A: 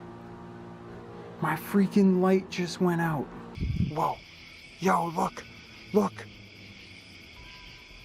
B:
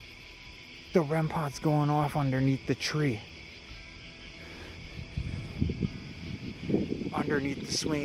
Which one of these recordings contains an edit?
A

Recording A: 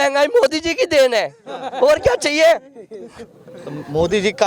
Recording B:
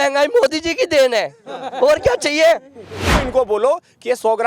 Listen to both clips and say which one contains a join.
B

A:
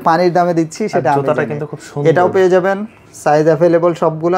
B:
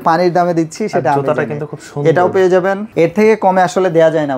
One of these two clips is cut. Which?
B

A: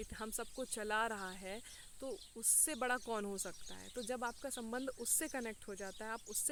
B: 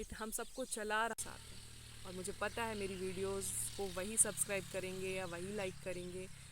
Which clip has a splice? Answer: B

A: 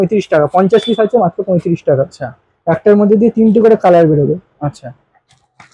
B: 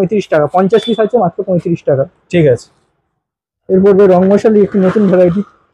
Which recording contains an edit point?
A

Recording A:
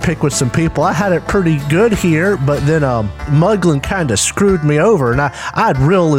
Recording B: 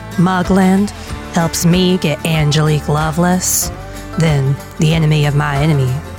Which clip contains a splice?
A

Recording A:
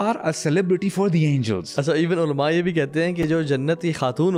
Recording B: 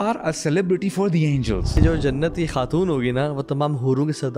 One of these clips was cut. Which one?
B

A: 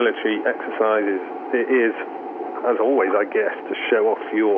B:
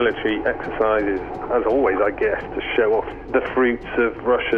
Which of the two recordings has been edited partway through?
B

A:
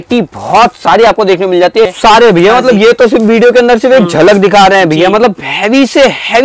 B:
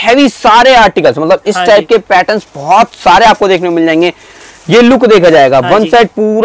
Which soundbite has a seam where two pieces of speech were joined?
A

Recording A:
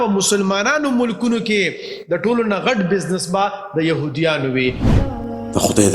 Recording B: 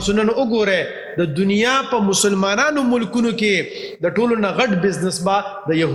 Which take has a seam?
A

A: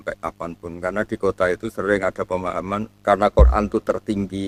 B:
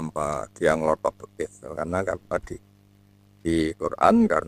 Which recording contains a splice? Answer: A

